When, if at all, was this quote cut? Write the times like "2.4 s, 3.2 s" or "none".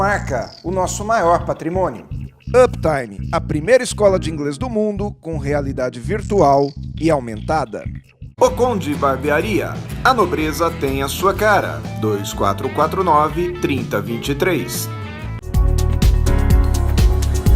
15.4 s